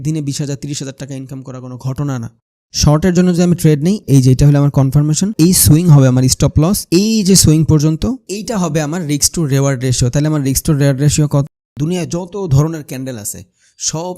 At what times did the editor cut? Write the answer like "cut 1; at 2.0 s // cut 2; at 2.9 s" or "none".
cut 1; at 2.4 s // cut 2; at 4.0 s // cut 3; at 5.3 s // cut 4; at 6.8 s // cut 5; at 11.5 s

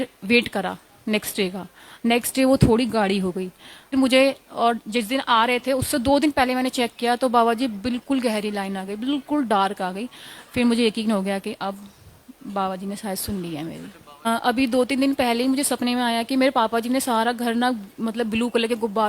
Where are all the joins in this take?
cut 1; at 3.9 s // cut 2; at 14.3 s

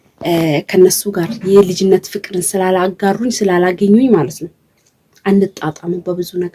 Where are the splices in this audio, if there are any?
none

